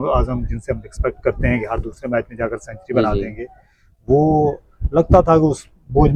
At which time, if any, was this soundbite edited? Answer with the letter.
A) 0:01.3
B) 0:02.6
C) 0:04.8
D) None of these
D